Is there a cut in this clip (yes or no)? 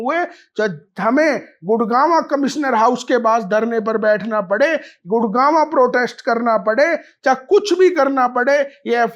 no